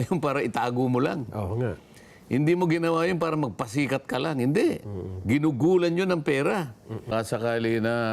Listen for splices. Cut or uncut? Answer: cut